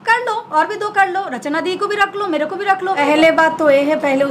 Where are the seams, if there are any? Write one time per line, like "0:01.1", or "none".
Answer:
0:03.0

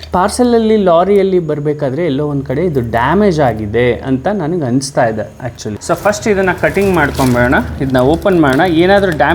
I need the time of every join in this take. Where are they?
none

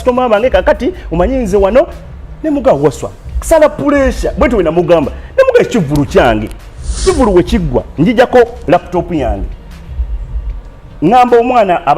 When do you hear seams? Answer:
0:07.0

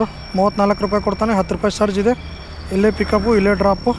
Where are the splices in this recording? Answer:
none

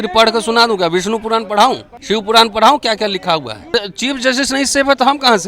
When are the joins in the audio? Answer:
0:01.9
0:03.7

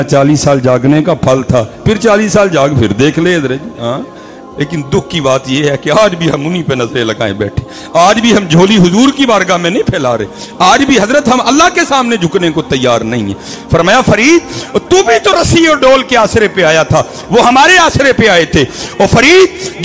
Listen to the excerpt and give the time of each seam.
0:04.6

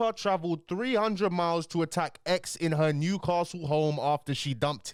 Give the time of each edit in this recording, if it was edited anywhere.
none

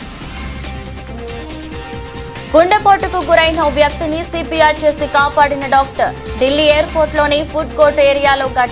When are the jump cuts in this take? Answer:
0:01.9

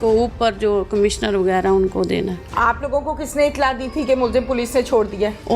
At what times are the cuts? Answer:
0:02.4

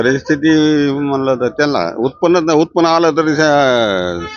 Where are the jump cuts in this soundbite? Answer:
none

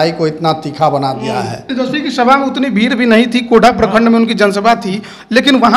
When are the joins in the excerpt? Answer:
0:01.6

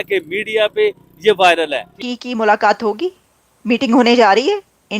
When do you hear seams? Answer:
0:01.9

